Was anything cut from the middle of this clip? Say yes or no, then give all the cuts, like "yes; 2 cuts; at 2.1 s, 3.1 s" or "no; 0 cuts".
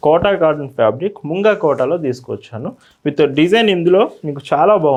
no; 0 cuts